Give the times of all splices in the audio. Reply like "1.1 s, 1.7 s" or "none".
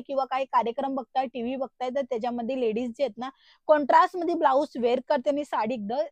none

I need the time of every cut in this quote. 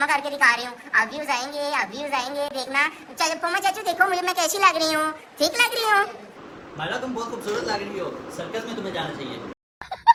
none

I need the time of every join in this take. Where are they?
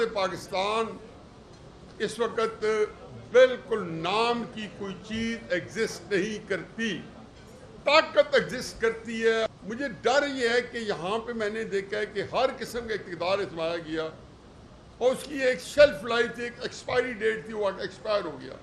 9.5 s

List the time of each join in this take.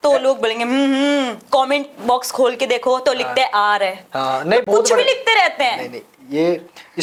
none

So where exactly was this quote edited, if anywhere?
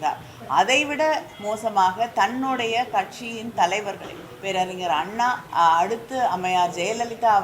5.4 s

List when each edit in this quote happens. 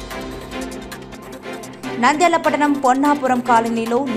1.0 s

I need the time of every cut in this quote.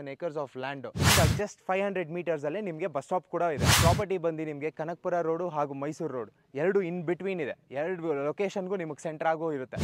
1.1 s, 3.7 s

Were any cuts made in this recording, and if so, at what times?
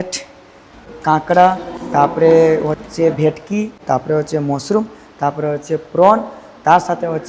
0.9 s, 3.8 s

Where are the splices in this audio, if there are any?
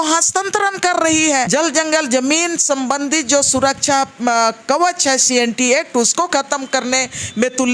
1.5 s

